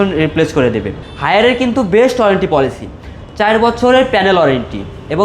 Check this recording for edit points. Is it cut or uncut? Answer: cut